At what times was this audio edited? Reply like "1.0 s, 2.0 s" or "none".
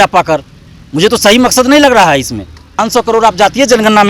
2.9 s